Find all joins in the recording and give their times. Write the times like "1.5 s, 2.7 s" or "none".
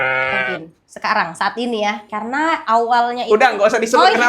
2.0 s